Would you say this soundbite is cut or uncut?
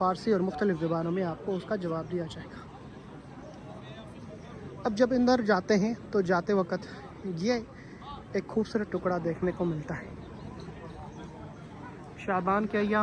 uncut